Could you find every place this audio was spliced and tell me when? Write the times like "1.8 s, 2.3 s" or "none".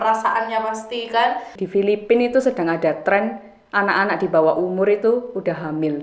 1.6 s